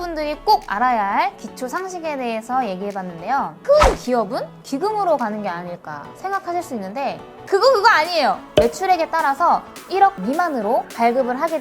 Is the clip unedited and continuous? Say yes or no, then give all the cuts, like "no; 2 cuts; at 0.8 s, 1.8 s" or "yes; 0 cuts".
no; 2 cuts; at 3.6 s, 8.5 s